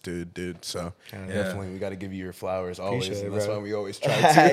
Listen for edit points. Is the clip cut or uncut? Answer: uncut